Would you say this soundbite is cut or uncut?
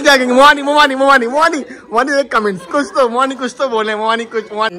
uncut